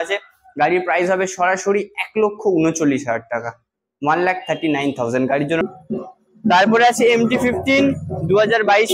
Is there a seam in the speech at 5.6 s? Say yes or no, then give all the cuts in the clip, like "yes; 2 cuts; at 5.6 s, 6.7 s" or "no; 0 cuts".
yes; 1 cut; at 5.6 s